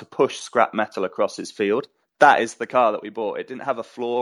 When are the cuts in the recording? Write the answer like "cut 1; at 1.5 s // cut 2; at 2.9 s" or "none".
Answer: cut 1; at 2.1 s